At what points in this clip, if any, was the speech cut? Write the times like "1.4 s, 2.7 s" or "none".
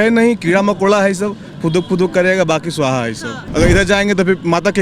3.4 s